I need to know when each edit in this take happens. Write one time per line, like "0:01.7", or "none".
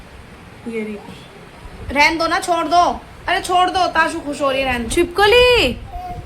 0:04.9